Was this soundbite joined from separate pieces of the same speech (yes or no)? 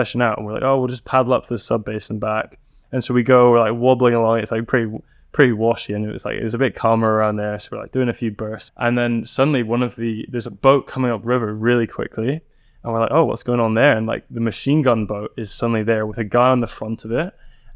yes